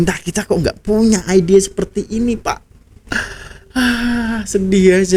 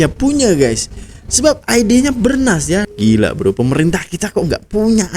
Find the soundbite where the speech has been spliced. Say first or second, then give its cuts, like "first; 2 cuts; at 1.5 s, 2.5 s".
second; 1 cut; at 2.9 s